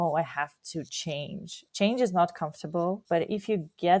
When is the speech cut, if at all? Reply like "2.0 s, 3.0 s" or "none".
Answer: 1.6 s, 3.0 s